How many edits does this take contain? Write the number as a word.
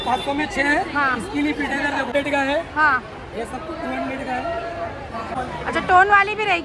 two